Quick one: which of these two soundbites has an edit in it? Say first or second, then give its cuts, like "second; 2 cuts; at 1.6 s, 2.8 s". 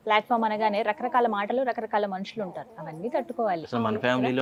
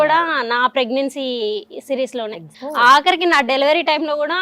second; 1 cut; at 2.5 s